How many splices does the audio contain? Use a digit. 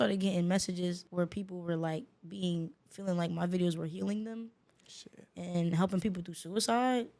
1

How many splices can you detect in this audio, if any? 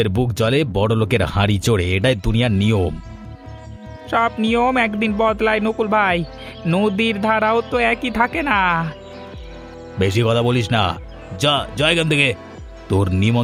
0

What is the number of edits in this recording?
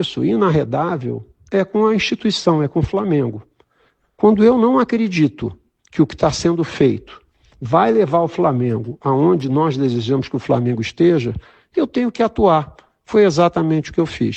1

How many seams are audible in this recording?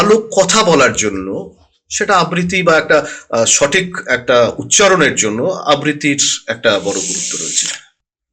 0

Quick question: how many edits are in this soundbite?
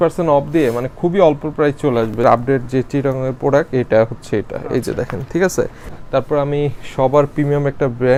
0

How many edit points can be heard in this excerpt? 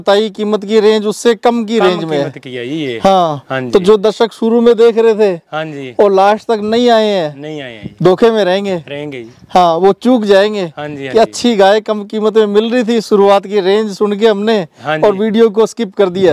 0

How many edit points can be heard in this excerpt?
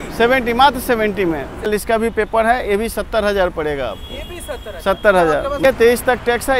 2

